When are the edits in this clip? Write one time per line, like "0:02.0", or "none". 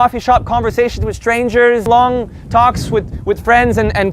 0:01.8